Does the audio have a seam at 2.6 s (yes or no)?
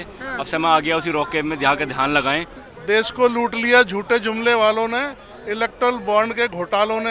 yes